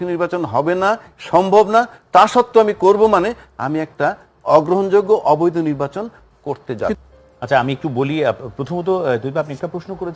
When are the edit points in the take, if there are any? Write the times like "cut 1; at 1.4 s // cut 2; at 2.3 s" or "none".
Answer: cut 1; at 7.0 s